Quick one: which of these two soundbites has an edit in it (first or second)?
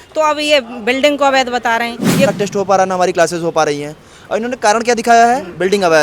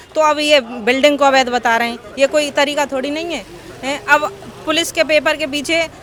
first